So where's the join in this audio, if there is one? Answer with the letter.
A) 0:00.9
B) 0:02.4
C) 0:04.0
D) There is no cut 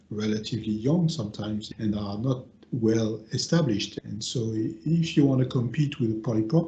C